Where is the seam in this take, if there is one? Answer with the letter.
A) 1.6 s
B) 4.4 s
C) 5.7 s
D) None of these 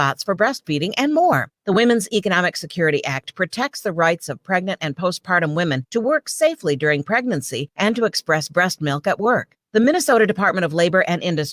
D